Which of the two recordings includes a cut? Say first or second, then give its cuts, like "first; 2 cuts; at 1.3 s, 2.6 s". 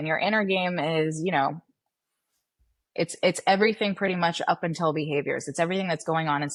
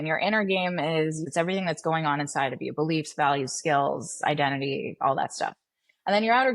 second; 1 cut; at 1.2 s